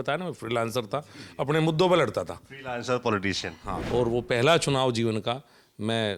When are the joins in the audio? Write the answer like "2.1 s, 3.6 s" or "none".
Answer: 3.7 s